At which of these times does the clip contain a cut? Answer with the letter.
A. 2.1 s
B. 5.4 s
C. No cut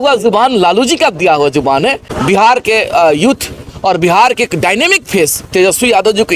A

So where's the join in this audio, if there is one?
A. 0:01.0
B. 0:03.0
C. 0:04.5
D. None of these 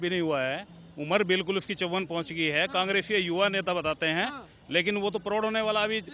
D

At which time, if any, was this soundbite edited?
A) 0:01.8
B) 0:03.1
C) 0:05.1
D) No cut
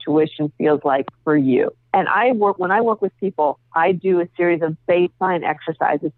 D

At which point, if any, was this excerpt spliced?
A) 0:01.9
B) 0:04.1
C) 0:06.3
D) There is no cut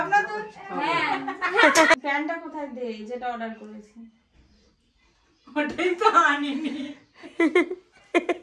A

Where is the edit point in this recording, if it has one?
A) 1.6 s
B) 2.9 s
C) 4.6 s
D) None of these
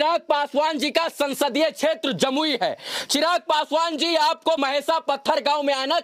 C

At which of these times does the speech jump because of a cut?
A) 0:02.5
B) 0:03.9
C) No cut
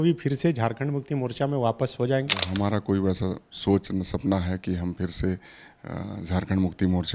A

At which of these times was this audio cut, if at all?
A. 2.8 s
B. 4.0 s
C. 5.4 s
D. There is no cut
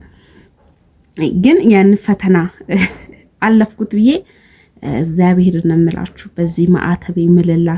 D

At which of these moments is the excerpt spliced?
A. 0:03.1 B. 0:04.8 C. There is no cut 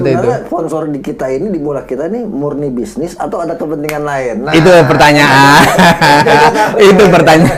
C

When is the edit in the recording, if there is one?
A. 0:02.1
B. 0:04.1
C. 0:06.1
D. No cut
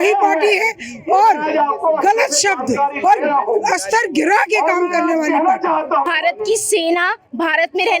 C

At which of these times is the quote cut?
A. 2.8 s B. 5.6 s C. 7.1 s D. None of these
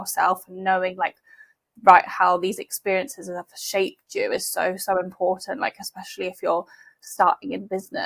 D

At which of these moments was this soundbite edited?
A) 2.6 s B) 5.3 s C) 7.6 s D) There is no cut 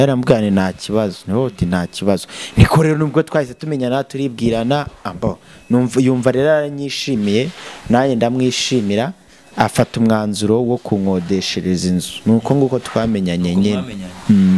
D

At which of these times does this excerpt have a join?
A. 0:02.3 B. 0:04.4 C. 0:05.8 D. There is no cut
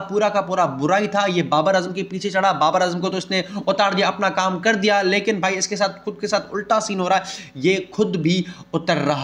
D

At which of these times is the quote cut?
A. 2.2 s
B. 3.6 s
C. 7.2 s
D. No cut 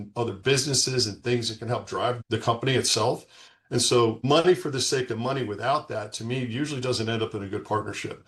A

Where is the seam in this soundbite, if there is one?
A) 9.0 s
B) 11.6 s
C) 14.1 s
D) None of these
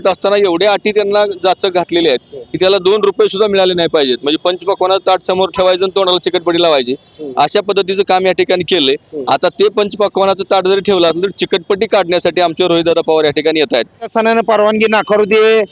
C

